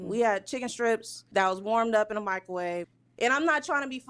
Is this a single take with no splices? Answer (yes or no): no